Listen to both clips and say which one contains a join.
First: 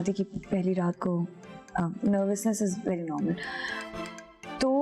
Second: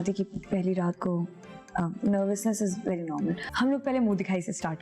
second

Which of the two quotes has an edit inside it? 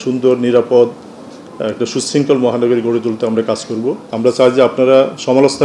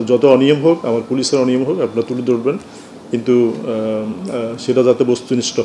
first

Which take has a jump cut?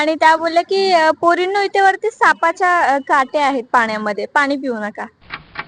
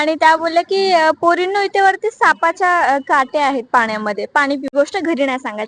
second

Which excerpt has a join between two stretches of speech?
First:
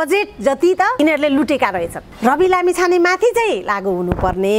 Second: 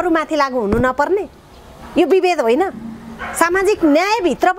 first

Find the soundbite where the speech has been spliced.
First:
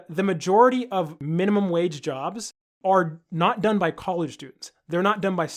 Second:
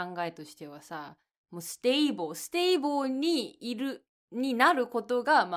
first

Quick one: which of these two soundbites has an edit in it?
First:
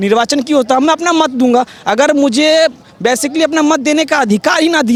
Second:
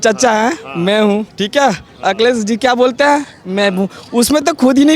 second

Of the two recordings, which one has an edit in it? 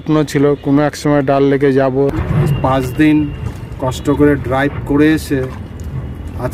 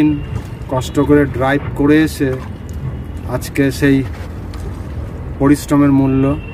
first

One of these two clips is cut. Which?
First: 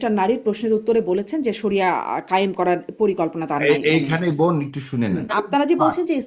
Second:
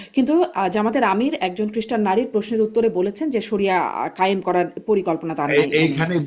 first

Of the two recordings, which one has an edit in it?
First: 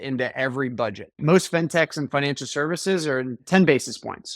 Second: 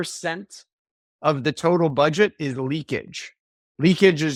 first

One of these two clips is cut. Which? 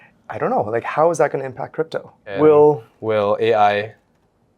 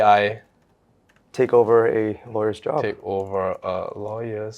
first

